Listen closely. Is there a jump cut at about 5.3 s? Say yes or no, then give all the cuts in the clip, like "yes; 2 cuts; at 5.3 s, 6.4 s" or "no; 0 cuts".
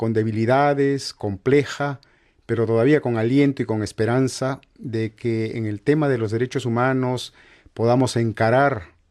yes; 1 cut; at 5.3 s